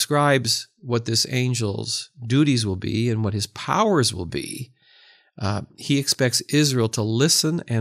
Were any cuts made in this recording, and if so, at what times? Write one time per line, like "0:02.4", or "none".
none